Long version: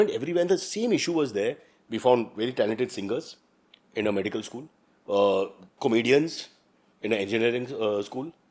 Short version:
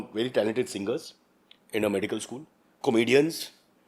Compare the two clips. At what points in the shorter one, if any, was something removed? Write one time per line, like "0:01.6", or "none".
0:02.7